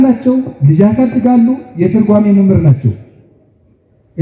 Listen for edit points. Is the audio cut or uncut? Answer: uncut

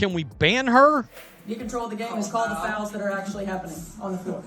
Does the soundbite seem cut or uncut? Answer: cut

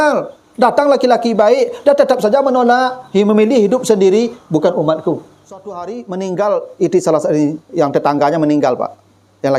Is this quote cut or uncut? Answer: cut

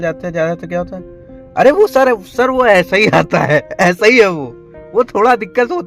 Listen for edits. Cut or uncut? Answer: uncut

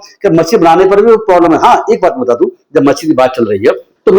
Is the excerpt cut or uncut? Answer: uncut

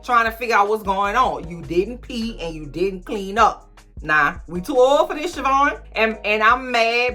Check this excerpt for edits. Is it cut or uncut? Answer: cut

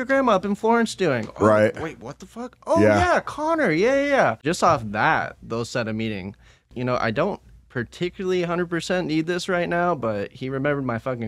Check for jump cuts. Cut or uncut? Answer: cut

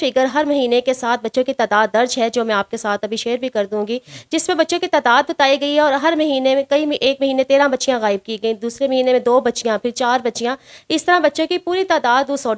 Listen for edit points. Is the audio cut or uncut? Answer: uncut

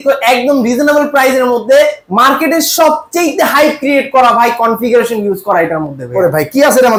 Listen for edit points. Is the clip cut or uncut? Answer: uncut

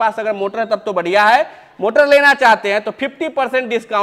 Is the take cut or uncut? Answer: uncut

